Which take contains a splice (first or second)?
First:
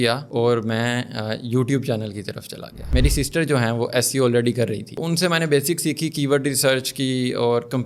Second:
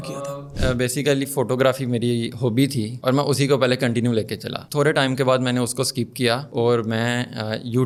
first